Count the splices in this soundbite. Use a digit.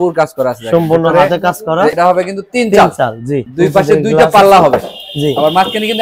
2